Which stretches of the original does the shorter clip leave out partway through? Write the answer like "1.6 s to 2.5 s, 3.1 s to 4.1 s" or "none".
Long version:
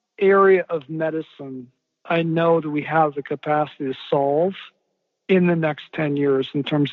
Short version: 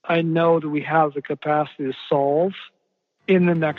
none